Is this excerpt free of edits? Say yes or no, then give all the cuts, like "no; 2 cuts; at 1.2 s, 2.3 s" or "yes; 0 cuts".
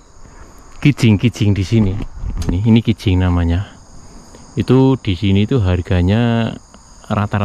no; 1 cut; at 2.6 s